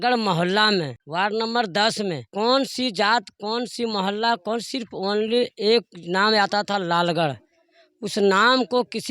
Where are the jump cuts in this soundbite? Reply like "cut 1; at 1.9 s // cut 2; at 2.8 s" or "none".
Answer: cut 1; at 1.0 s // cut 2; at 2.2 s